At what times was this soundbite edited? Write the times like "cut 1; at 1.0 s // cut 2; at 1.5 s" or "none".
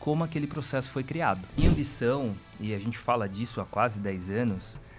cut 1; at 1.6 s